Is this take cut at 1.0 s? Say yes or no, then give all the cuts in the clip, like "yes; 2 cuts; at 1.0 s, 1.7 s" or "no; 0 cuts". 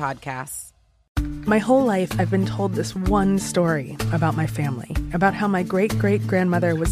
yes; 1 cut; at 1.0 s